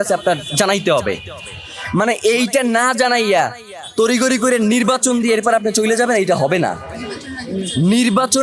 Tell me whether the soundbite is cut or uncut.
uncut